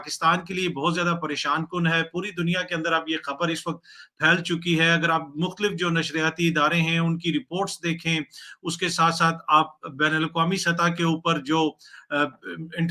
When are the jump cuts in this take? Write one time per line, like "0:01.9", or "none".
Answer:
none